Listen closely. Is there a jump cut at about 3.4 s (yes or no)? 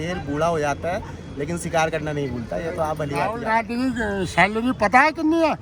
yes